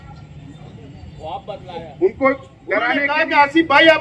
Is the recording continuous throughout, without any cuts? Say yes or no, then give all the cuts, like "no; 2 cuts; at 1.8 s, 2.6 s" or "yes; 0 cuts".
no; 1 cut; at 3.1 s